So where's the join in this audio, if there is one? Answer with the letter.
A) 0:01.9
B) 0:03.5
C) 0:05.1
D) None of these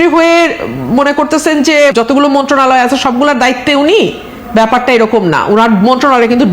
A